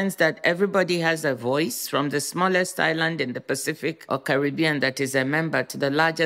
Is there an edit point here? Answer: yes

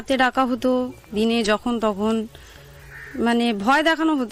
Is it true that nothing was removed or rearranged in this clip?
yes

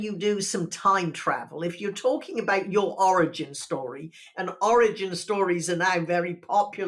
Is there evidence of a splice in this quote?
no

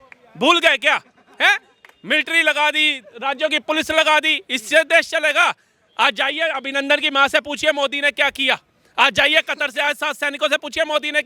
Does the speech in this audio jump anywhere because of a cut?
no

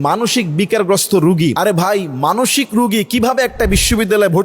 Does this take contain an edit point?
yes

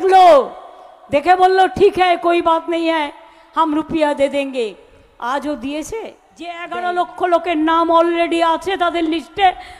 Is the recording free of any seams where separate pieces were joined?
no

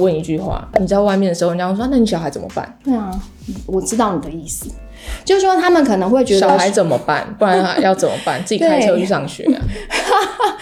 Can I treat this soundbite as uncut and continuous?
yes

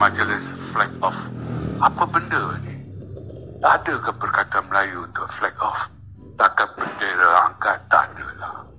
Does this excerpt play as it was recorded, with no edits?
yes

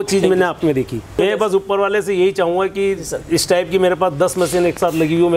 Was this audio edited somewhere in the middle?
yes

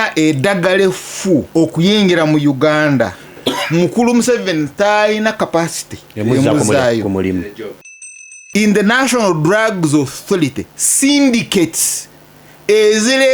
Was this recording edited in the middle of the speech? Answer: yes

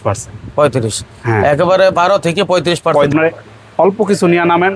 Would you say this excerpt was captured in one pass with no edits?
no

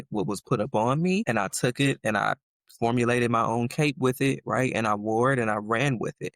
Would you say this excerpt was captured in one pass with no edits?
no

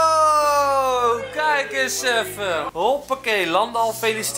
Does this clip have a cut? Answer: yes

